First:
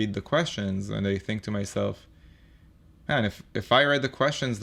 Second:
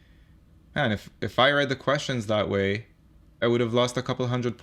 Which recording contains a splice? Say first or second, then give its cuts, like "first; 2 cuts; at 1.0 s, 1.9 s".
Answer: second; 1 cut; at 3.4 s